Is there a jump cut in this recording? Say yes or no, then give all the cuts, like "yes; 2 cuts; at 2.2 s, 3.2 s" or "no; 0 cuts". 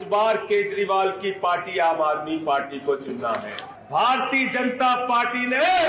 yes; 1 cut; at 3.7 s